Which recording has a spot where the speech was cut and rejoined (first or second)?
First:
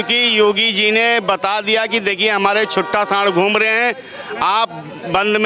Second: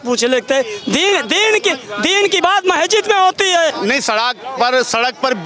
second